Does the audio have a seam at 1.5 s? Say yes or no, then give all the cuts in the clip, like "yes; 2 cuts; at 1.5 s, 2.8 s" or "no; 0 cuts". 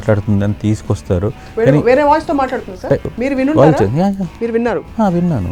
no; 2 cuts; at 3.1 s, 4.3 s